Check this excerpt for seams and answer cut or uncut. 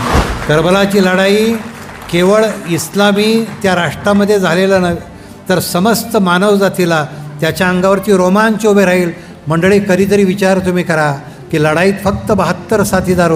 uncut